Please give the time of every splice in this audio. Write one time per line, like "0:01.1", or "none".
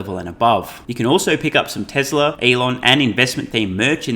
0:00.8
0:02.4